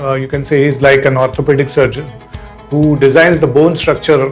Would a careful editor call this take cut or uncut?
uncut